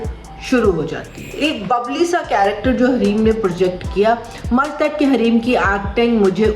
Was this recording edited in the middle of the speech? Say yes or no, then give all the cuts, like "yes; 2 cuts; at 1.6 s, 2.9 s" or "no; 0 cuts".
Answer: yes; 1 cut; at 1.2 s